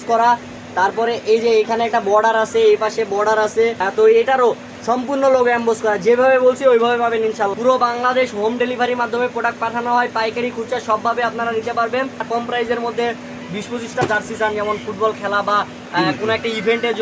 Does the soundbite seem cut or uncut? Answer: cut